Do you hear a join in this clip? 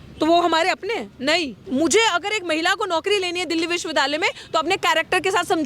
yes; 1 cut; at 1.6 s

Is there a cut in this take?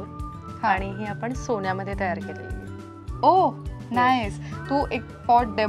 no; 0 cuts

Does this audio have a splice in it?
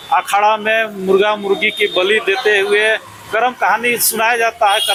no; 0 cuts

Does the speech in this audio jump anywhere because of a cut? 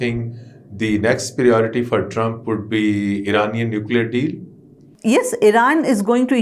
yes; 1 cut; at 4.9 s

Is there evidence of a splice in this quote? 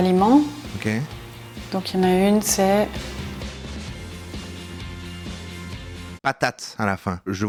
no; 0 cuts

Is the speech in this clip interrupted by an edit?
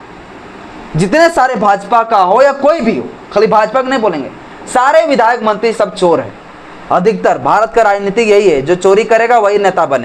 no; 0 cuts

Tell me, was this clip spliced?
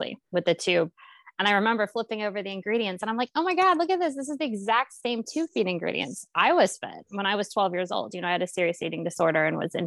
no; 0 cuts

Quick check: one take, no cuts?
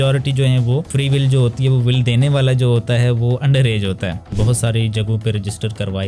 no; 2 cuts; at 0.9 s, 4.2 s

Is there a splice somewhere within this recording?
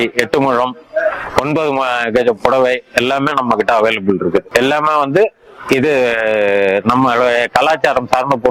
no; 0 cuts

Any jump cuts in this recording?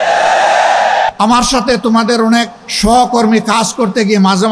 yes; 2 cuts; at 1.1 s, 2.6 s

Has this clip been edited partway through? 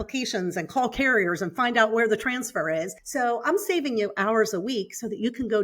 yes; 1 cut; at 3.0 s

